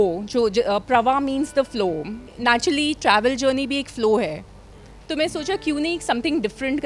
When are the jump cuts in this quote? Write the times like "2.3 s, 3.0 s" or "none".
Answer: 2.3 s